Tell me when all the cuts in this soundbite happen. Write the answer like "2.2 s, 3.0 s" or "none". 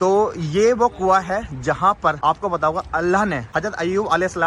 2.2 s, 3.4 s